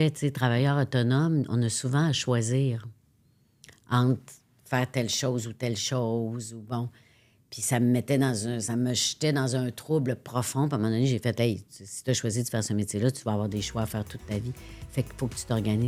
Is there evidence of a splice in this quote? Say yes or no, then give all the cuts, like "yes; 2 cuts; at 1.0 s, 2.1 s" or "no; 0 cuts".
no; 0 cuts